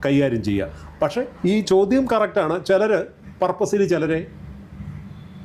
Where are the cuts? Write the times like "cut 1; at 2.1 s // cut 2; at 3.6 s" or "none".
none

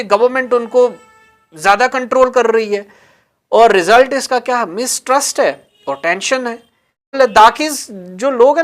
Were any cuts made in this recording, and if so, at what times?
cut 1; at 7.2 s

